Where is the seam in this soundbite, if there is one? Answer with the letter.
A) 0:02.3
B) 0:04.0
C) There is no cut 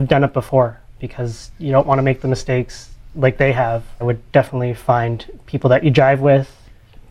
B